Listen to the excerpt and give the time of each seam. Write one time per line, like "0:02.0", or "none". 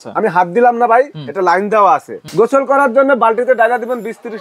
0:02.2